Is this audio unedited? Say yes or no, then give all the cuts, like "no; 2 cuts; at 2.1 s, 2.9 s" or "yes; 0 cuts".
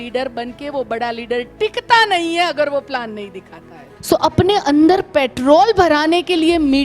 no; 1 cut; at 3.8 s